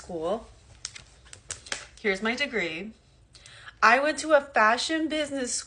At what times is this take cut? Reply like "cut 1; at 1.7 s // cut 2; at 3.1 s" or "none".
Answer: none